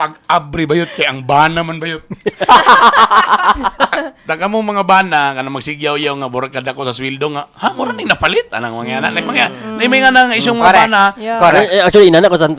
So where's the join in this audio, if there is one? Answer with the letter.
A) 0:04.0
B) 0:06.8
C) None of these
A